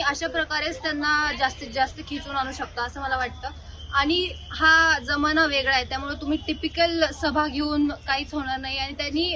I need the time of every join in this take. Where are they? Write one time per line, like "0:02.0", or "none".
none